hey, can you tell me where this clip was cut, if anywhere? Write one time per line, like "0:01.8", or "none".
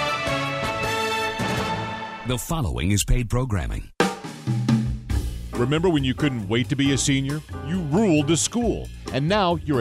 0:02.2
0:03.8